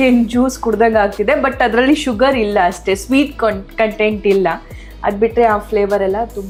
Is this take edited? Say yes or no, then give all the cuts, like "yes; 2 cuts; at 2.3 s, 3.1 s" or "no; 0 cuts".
no; 0 cuts